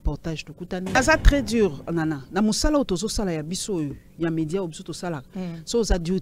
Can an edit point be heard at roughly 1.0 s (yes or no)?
yes